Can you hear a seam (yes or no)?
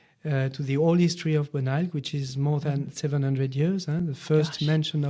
no